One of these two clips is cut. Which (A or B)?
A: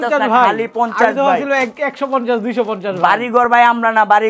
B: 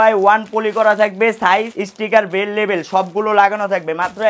B